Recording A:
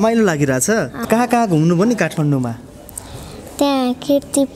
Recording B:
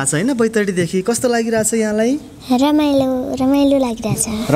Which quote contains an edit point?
A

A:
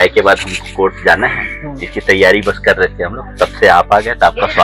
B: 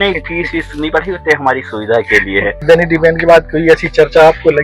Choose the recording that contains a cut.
B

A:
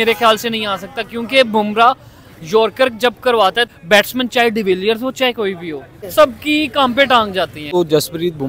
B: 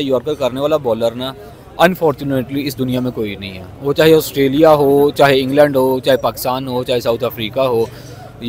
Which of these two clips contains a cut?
A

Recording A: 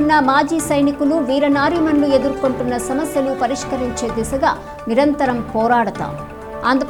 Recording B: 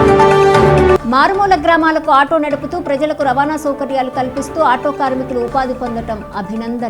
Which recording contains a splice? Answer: B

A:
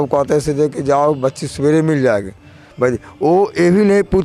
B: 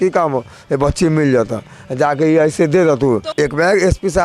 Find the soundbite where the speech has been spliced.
B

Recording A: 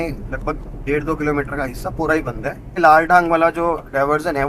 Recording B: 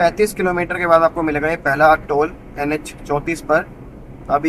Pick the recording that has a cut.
A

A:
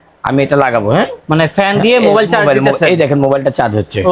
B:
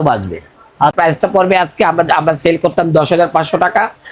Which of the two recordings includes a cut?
B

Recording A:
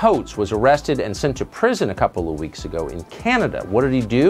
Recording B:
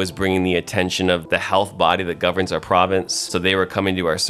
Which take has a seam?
B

